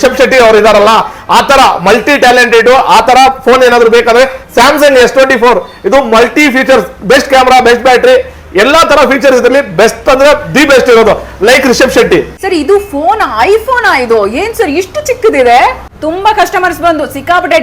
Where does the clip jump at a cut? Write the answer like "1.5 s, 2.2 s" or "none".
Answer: 12.4 s, 15.9 s